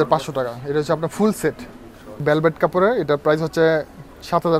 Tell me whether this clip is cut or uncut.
cut